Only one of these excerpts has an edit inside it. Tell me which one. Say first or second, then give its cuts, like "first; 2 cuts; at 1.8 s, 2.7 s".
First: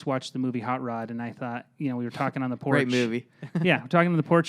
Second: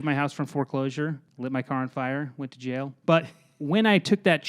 second; 2 cuts; at 1.3 s, 2.9 s